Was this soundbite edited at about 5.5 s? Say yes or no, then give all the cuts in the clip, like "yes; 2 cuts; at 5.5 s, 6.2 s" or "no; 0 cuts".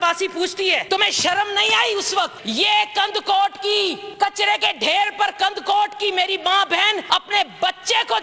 no; 4 cuts; at 0.8 s, 2.4 s, 4.0 s, 7.0 s